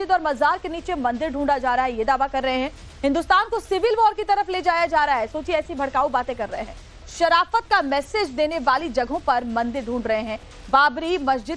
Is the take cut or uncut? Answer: cut